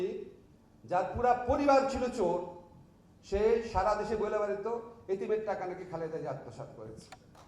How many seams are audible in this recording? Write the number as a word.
zero